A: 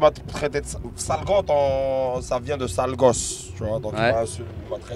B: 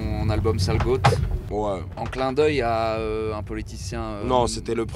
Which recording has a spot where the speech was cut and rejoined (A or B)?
B